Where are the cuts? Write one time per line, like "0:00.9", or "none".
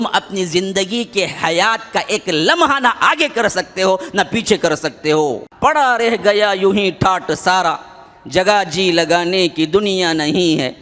0:05.5